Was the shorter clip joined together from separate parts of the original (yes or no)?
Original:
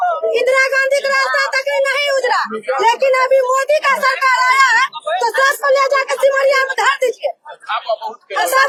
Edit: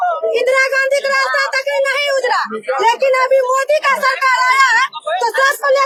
no